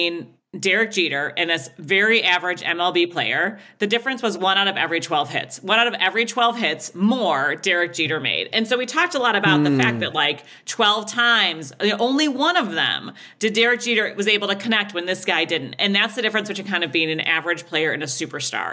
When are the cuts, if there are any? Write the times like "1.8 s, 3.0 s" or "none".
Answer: none